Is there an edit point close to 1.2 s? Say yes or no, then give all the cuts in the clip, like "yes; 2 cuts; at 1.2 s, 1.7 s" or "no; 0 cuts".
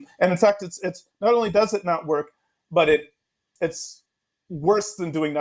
no; 1 cut; at 3.5 s